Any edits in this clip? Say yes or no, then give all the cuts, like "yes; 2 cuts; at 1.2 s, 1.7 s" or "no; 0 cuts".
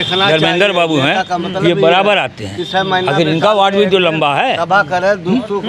no; 0 cuts